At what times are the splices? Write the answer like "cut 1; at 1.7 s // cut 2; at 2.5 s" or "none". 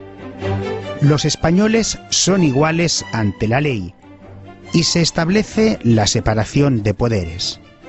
cut 1; at 3.9 s